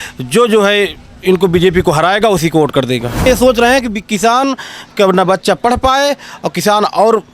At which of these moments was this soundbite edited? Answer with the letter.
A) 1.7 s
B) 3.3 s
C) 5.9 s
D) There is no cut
B